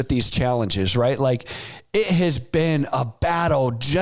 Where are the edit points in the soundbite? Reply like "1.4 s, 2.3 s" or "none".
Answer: none